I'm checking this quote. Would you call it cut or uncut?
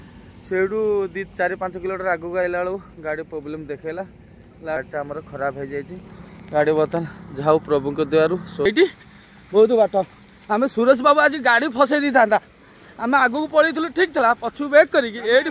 cut